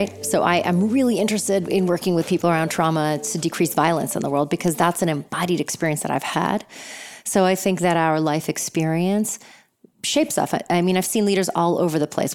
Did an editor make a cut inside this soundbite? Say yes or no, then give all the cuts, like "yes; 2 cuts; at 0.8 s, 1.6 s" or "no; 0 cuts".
yes; 1 cut; at 1.6 s